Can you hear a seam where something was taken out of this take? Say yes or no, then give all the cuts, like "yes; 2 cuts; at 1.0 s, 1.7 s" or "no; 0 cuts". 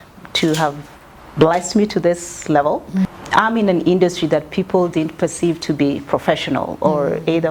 yes; 1 cut; at 3.2 s